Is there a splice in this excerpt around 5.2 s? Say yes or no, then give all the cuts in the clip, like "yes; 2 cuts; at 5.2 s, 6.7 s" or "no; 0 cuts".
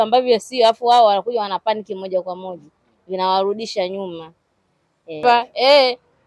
yes; 1 cut; at 5.2 s